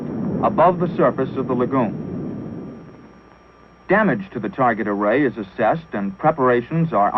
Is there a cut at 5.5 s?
no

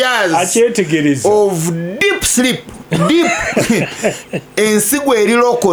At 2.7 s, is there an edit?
no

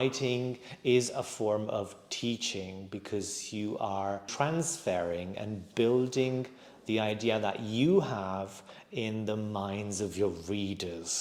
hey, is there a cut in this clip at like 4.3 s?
yes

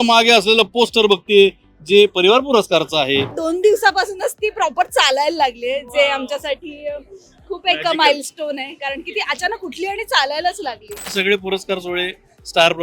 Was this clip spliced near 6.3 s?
no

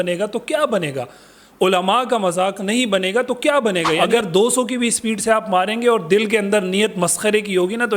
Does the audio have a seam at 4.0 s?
yes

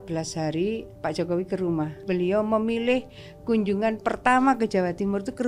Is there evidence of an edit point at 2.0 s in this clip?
yes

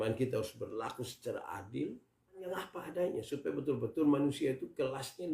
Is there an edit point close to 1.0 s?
no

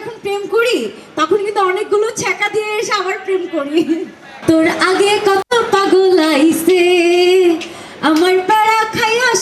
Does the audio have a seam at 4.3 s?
no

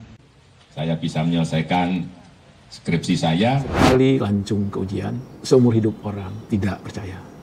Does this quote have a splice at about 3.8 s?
yes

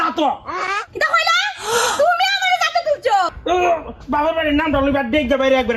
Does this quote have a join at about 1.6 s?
no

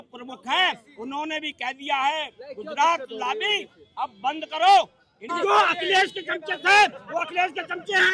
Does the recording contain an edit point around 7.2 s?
no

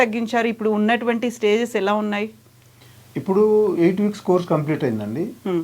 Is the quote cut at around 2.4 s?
no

